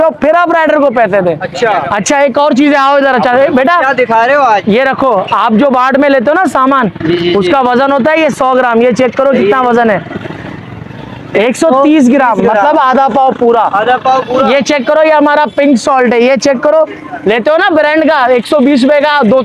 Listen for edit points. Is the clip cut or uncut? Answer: uncut